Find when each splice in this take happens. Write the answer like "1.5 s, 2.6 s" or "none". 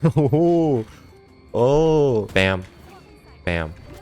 2.3 s

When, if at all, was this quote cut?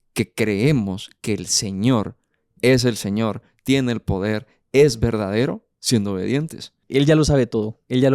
6.8 s

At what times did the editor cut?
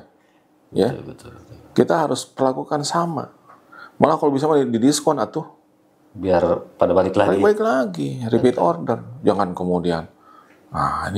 none

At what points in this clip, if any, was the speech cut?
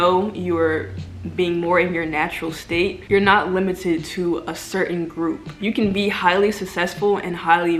none

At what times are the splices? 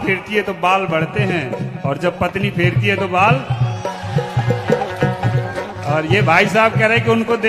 none

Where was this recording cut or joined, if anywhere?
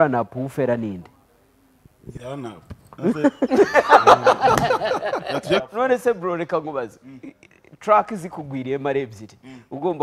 5.7 s

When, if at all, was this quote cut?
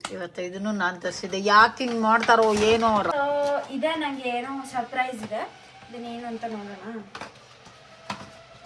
3.1 s

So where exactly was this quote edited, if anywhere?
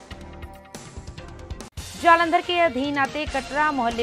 1.7 s

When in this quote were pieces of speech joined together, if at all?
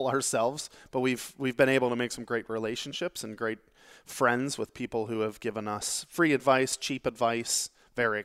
none

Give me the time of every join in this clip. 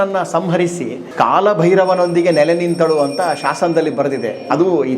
1.0 s

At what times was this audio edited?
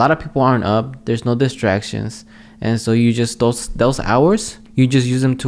4.6 s

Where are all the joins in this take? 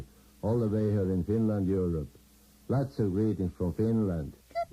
3.2 s

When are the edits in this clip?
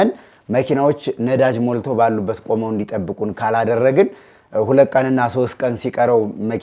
none

